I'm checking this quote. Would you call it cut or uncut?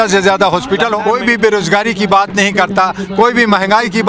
cut